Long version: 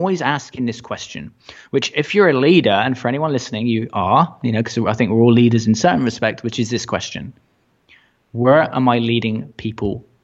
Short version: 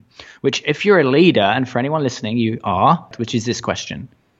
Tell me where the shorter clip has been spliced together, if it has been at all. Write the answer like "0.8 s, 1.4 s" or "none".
3.1 s